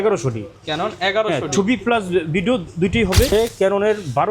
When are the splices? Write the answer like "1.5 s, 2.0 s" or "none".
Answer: 3.3 s